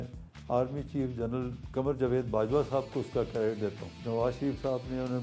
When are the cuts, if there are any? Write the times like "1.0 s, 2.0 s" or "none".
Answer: 3.9 s